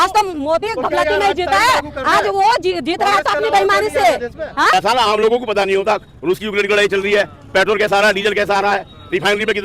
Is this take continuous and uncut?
no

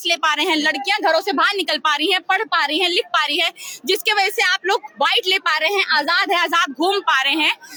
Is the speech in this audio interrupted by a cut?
no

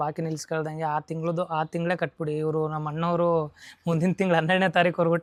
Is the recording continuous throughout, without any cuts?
yes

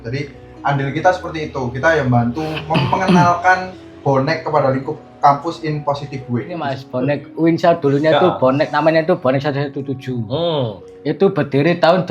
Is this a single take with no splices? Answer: no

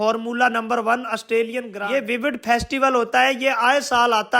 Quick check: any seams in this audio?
yes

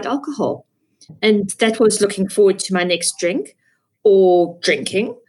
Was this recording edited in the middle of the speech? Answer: no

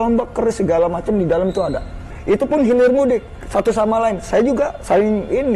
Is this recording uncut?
no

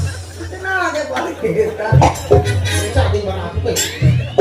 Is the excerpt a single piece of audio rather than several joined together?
no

